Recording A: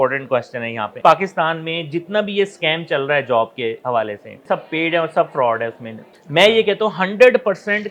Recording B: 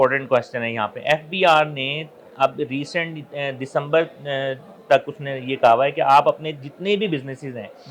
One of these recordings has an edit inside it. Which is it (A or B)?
A